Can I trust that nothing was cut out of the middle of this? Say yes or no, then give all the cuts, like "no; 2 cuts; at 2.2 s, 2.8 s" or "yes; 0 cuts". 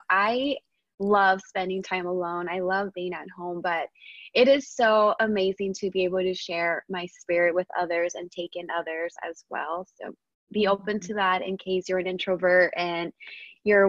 yes; 0 cuts